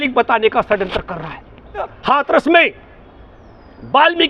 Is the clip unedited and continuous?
no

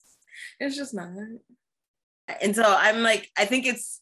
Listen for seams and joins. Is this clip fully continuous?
no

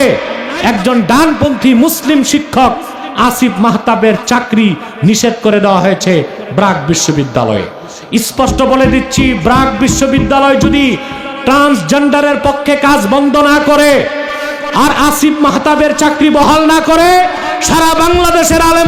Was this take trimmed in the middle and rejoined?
no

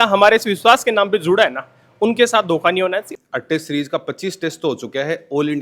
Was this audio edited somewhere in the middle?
yes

